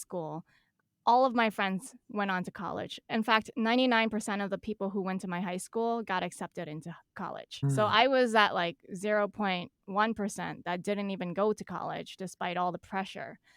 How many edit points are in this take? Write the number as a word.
one